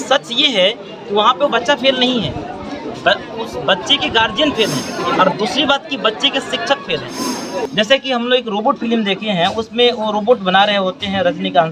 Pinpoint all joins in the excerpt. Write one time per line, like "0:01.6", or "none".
0:05.0
0:07.7